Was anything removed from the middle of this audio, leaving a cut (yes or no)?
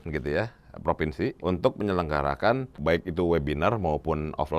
yes